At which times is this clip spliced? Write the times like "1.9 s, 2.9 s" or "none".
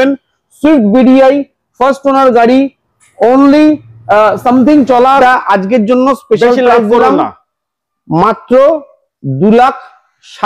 5.2 s